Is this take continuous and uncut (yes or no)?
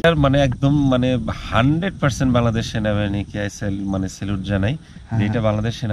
yes